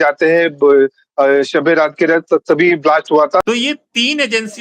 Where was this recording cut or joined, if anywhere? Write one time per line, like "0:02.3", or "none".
0:03.4